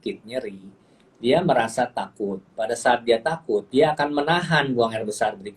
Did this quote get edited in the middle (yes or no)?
yes